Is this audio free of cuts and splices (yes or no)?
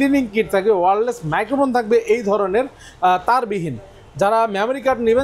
yes